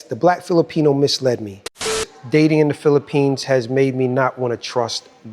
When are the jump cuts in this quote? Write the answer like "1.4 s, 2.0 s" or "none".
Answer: 2.1 s